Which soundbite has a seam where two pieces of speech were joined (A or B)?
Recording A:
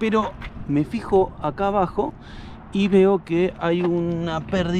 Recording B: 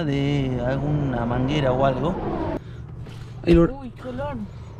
B